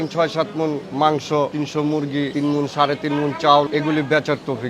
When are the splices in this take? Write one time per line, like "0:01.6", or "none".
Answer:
0:00.9
0:02.0
0:03.7